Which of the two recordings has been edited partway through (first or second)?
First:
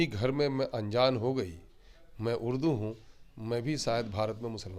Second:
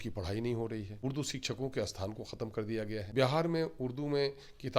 second